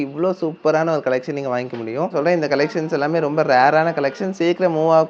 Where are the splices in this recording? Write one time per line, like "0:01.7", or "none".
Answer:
0:02.1

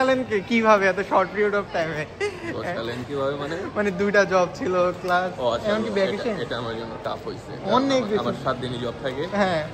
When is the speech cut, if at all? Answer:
none

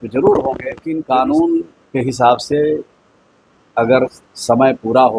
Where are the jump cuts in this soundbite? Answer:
0:00.9

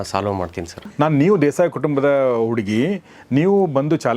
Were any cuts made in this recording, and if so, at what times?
0:00.9

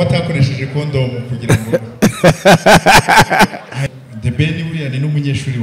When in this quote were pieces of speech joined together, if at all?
0:03.8

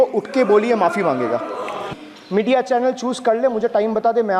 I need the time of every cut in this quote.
0:01.8

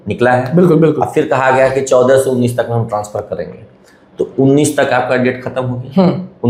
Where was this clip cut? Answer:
none

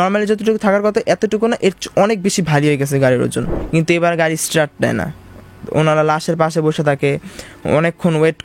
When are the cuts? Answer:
0:03.6

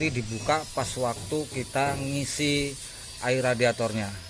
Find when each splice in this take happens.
none

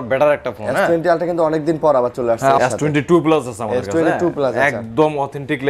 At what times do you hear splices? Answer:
0:02.6

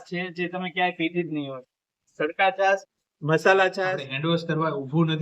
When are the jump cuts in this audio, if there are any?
0:04.1

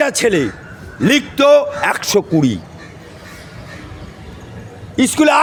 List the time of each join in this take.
none

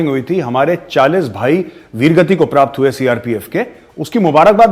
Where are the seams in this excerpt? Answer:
none

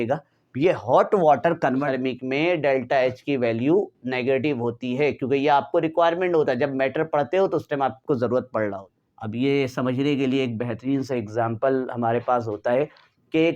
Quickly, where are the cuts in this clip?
0:01.9
0:08.9

